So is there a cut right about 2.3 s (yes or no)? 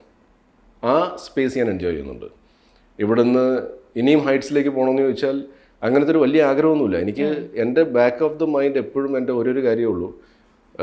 no